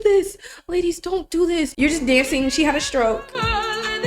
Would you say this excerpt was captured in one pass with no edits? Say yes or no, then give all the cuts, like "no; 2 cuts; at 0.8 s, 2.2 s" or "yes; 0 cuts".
no; 1 cut; at 1.7 s